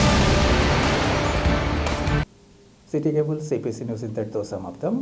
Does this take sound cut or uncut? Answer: uncut